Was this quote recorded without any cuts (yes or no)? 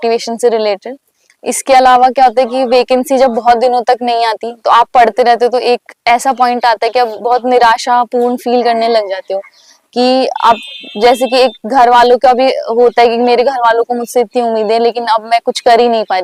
yes